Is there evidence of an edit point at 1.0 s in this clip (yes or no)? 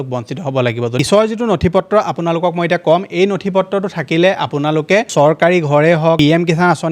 yes